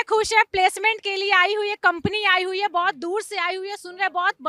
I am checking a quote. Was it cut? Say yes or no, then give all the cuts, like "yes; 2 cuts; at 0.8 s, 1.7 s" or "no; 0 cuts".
no; 0 cuts